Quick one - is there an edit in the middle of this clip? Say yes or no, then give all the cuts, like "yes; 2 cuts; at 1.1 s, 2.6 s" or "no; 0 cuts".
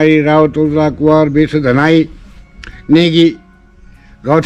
no; 0 cuts